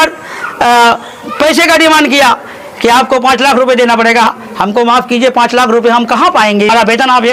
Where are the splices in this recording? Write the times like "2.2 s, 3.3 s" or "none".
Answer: none